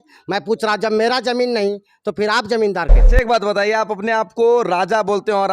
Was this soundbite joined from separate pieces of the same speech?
yes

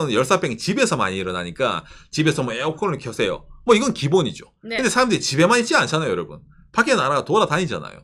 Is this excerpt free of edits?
yes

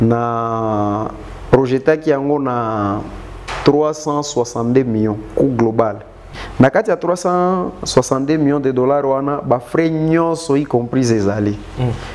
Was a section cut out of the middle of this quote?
yes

